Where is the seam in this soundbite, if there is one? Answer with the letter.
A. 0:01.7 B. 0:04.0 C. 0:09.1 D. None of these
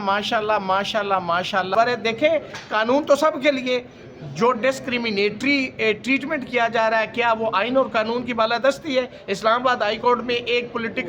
A